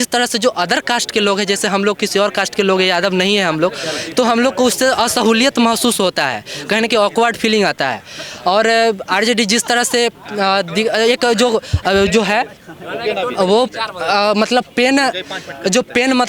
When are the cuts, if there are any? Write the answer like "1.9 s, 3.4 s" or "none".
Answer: none